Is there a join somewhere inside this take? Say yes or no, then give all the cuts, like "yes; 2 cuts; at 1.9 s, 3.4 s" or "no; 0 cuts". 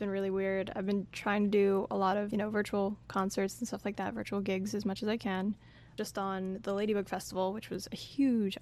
yes; 2 cuts; at 2.3 s, 5.9 s